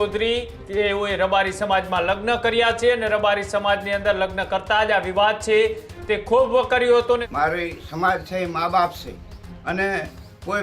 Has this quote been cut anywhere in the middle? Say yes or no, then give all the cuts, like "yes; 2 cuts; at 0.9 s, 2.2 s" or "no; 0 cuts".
yes; 1 cut; at 7.3 s